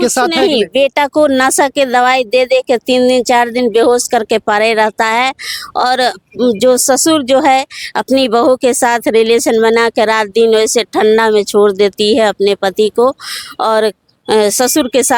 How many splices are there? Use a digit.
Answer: 0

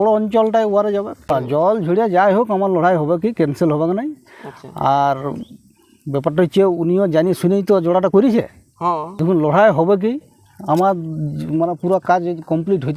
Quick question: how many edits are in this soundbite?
2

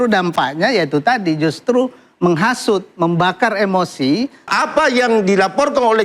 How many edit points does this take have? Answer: 1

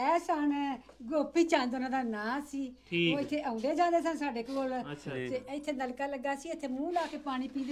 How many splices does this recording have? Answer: 0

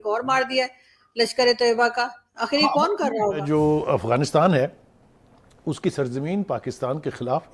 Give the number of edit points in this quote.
1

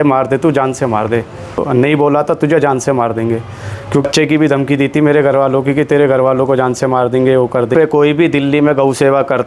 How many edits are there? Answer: 3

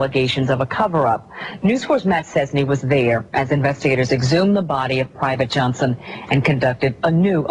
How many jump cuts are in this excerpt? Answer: 0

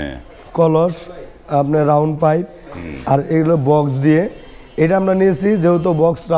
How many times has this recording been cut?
0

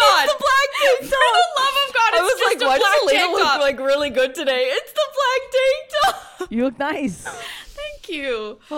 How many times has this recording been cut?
0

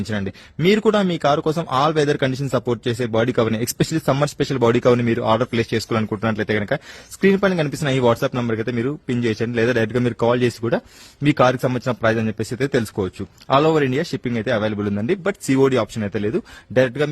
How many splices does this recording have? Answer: 1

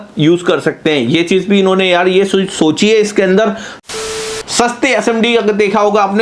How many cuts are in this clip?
1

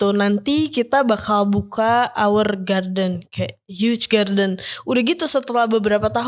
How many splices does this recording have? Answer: 1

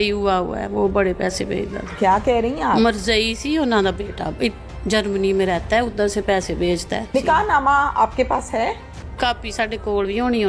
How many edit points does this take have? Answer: 2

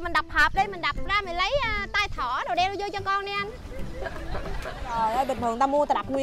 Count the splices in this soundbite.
1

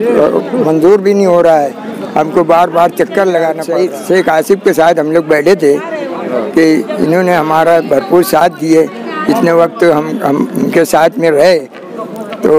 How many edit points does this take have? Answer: 1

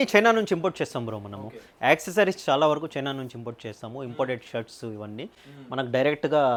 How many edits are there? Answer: 0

